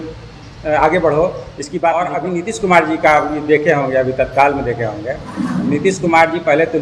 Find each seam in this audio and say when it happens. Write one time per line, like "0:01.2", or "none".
0:02.1